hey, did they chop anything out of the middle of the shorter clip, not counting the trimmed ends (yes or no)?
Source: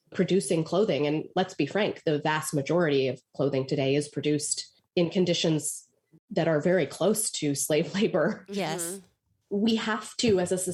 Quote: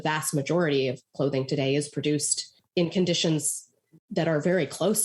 no